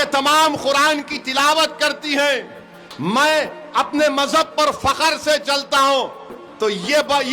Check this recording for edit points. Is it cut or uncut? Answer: uncut